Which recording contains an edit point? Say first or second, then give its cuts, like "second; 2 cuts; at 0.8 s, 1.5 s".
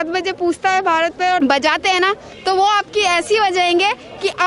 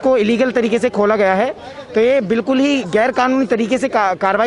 first; 1 cut; at 1.4 s